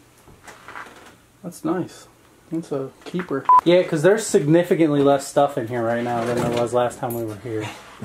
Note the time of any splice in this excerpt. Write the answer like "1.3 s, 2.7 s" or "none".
3.5 s

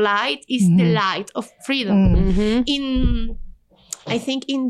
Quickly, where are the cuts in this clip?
none

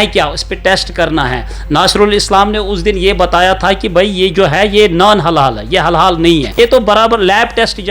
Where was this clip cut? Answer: 6.5 s

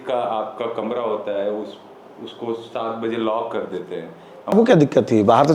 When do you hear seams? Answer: 4.5 s

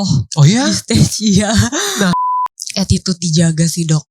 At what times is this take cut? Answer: 2.2 s

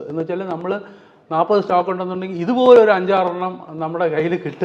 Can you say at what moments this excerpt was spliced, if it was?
none

